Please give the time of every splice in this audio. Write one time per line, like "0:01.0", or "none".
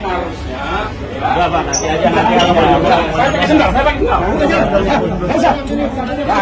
none